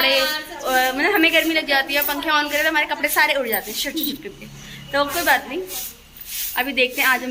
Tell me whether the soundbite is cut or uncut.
uncut